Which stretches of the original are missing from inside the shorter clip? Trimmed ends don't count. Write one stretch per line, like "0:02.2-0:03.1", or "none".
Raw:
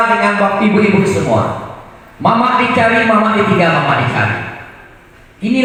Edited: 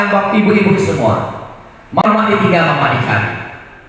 0:02.3-0:03.1